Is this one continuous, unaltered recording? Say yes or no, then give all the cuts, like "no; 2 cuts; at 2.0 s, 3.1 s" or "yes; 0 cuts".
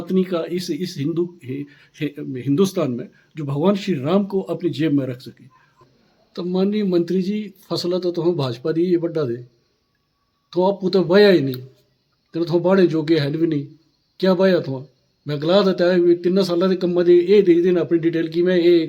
no; 1 cut; at 5.8 s